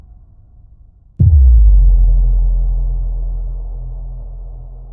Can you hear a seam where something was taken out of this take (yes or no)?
no